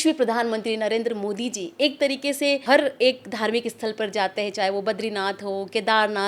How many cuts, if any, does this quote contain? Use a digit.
1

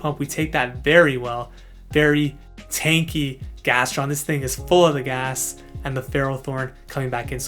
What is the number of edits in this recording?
0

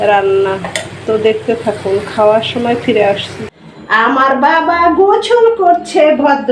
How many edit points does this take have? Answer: 1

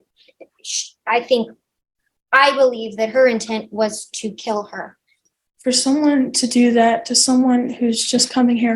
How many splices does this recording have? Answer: 1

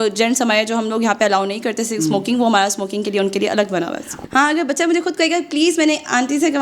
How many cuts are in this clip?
1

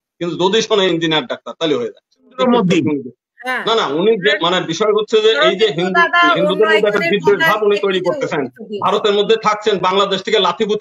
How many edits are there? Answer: 1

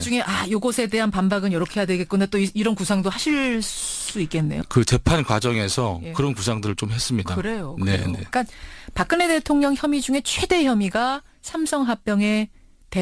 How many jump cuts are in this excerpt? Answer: 1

